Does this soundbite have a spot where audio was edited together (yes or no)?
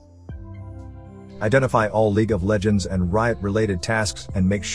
yes